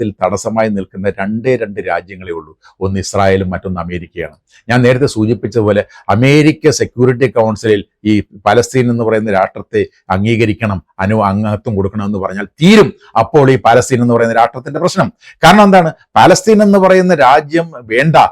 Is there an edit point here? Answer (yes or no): no